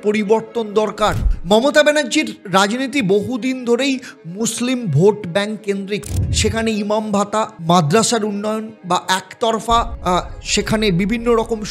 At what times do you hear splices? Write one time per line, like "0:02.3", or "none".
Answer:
0:01.2
0:08.7
0:09.9